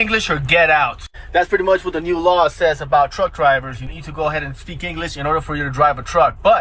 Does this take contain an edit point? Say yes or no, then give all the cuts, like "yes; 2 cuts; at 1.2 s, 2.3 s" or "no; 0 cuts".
no; 0 cuts